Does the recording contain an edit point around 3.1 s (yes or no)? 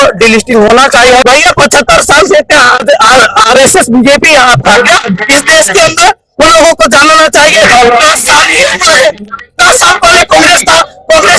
no